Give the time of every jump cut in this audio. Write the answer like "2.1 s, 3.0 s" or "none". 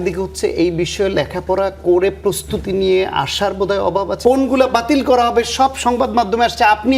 4.1 s